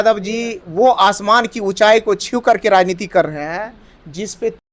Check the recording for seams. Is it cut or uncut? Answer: uncut